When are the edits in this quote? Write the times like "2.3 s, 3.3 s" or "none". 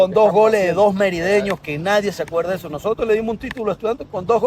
none